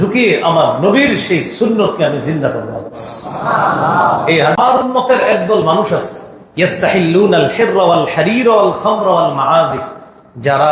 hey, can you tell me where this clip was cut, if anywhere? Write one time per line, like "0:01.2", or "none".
0:04.6